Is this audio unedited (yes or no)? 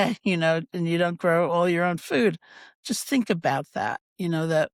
yes